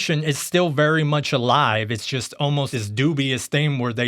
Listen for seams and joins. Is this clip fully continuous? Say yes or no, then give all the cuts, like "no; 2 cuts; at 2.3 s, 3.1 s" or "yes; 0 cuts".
no; 1 cut; at 2.7 s